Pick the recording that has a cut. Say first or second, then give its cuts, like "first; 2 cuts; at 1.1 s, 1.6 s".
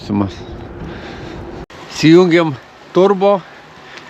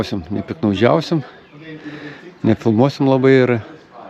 first; 1 cut; at 1.6 s